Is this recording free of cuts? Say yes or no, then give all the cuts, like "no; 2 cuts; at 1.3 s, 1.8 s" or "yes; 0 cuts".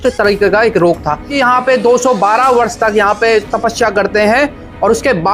no; 1 cut; at 1.3 s